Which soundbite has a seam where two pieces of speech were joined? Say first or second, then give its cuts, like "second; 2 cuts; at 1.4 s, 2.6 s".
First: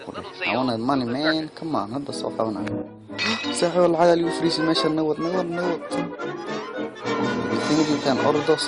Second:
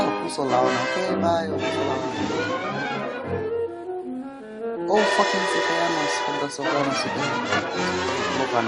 second; 1 cut; at 2.4 s